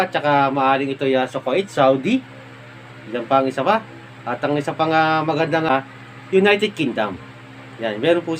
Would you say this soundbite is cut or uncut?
cut